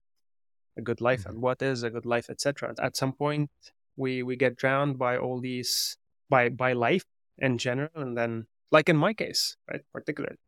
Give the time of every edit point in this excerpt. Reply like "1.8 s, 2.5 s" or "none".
2.7 s